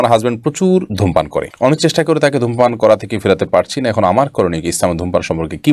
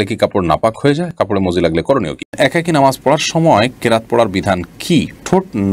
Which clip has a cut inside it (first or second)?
second